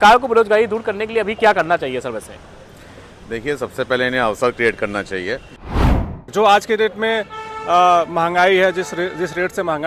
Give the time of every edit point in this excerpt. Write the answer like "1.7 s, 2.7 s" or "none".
6.0 s

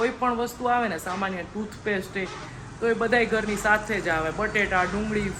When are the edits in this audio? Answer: none

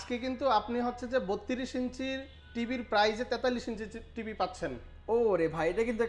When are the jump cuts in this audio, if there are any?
none

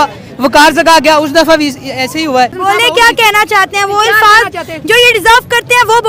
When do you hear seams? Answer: 2.6 s

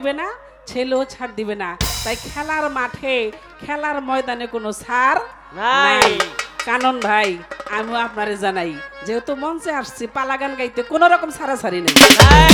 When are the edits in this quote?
none

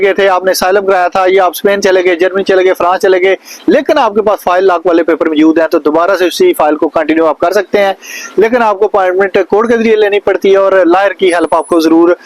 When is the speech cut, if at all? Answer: none

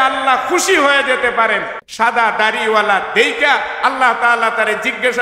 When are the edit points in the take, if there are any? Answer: 1.8 s

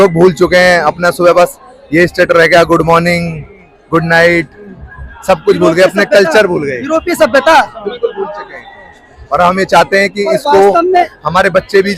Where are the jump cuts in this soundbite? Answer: none

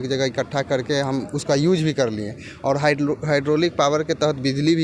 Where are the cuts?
none

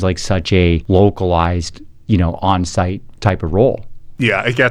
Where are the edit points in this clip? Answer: 0.8 s, 3.0 s

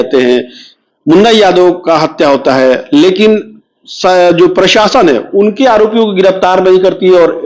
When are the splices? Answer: none

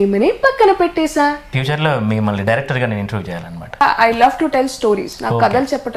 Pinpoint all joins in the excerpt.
1.5 s, 3.8 s

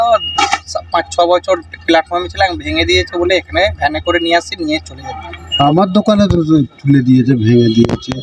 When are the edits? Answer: 5.6 s

